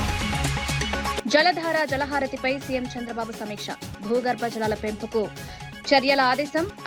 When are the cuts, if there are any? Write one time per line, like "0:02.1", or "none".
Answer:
none